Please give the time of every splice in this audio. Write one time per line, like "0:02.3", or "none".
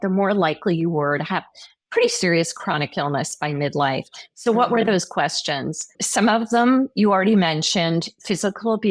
0:06.0